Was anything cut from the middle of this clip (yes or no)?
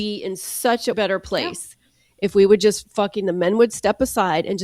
yes